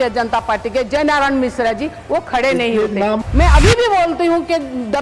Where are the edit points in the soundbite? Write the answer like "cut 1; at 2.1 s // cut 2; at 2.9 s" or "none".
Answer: cut 1; at 3.2 s